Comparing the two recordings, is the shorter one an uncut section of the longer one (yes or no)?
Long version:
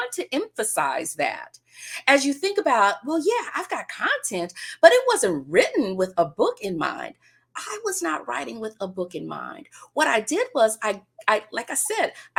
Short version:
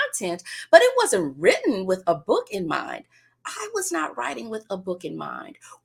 yes